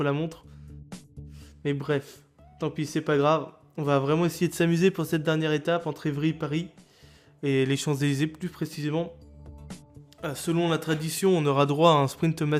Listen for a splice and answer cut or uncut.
cut